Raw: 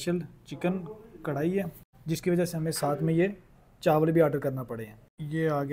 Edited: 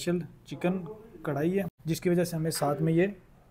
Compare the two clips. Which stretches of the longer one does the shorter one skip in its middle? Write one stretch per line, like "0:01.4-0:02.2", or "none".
0:01.8-0:02.0

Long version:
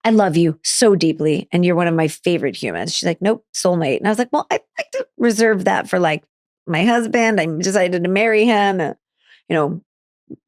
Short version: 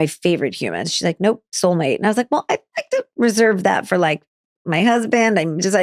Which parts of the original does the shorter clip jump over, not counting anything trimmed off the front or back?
none

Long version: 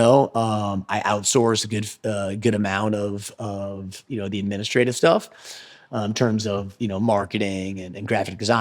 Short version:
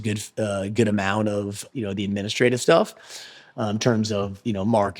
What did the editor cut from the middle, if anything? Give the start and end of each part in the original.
0:03.3-0:04.0

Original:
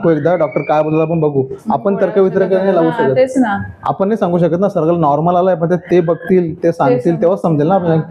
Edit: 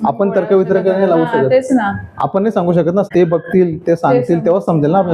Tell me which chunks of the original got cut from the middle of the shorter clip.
0:04.7-0:05.8

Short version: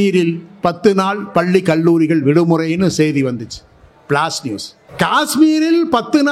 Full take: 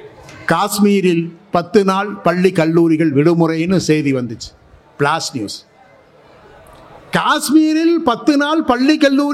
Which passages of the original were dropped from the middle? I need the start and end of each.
0:05.7-0:06.9

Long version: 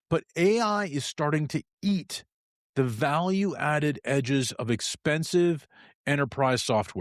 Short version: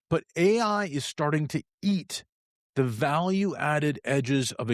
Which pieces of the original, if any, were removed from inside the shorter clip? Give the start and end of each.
none

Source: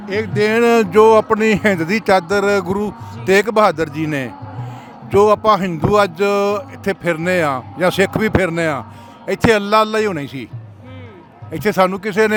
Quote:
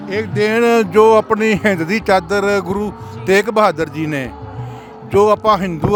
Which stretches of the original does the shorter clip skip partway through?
none

